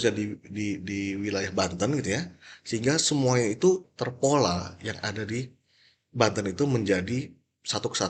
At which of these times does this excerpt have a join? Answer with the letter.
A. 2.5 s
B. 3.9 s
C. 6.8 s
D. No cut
B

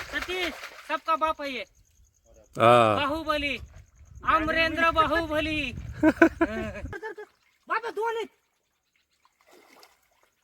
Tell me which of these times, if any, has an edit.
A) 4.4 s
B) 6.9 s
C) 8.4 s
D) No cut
B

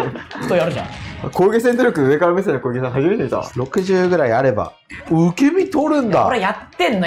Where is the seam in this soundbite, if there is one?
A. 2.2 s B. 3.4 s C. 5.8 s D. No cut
B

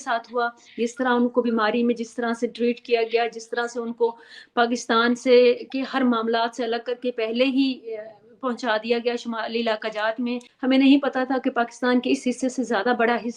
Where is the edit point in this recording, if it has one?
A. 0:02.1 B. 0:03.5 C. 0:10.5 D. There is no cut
C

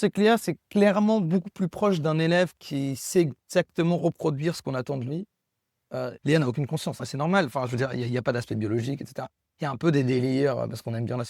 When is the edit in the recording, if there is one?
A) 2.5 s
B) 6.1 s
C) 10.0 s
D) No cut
B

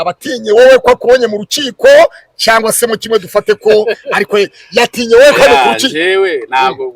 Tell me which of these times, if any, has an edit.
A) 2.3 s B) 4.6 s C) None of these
C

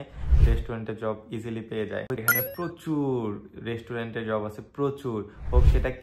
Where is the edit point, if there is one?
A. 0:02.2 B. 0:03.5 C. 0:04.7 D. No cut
A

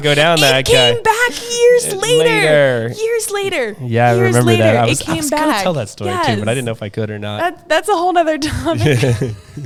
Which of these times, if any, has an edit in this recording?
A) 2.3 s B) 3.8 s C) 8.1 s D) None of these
D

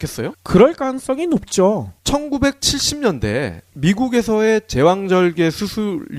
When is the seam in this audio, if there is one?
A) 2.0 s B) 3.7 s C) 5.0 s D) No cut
D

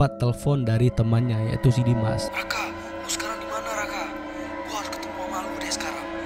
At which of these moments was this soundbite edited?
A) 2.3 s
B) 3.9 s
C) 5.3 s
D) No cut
A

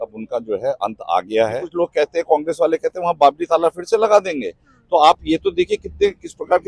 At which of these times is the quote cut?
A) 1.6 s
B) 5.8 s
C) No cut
A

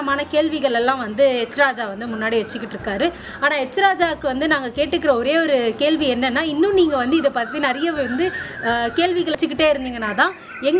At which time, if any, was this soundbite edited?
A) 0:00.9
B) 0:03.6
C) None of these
C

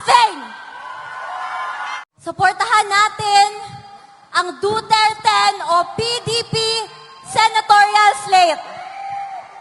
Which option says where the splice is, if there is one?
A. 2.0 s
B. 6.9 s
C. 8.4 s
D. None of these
A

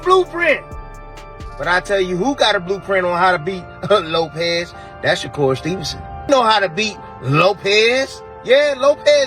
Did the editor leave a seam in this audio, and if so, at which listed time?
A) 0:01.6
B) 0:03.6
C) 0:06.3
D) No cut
C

